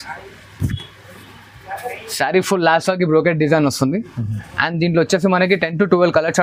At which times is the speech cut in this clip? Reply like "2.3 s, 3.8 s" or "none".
none